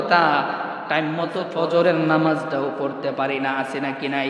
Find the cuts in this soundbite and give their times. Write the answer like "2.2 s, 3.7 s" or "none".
1.5 s